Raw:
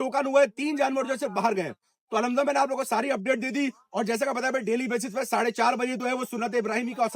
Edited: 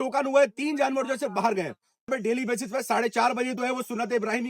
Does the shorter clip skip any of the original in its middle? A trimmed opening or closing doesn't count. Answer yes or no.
yes